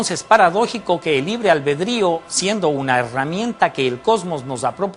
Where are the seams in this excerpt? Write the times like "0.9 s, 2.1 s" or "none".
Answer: 1.4 s